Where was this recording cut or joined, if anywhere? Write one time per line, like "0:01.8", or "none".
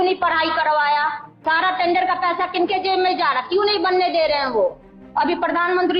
0:01.3
0:05.0